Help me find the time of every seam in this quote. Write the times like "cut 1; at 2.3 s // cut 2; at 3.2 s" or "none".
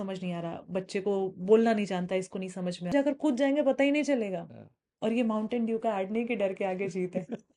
cut 1; at 2.9 s